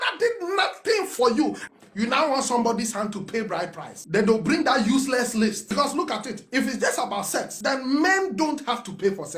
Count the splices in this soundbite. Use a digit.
2